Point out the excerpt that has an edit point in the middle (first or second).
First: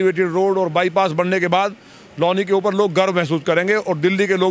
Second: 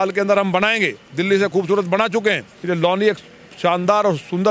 second